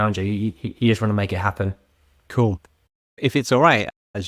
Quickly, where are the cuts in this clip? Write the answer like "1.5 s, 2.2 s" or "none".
none